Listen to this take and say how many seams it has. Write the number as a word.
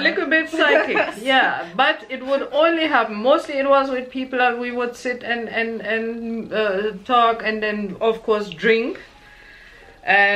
zero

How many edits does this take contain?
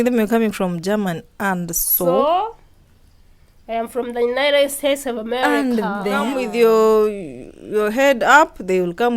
one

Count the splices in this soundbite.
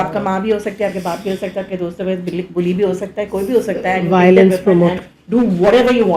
zero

